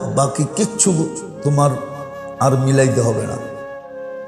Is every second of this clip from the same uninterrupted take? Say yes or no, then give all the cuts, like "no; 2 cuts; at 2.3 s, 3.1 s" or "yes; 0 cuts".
yes; 0 cuts